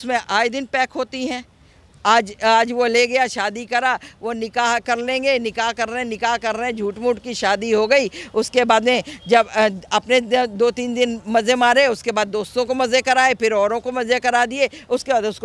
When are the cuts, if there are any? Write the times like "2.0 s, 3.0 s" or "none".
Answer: none